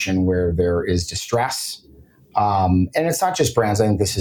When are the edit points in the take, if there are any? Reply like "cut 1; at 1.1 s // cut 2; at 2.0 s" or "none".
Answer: none